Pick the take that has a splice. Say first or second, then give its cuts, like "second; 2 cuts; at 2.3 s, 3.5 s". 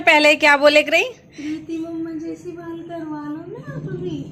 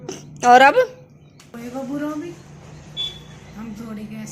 second; 1 cut; at 1.5 s